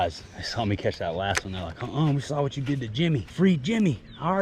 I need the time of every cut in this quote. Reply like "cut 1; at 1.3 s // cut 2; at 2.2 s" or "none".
cut 1; at 3.3 s